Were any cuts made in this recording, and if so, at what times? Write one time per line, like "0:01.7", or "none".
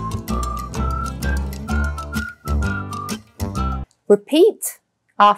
0:03.9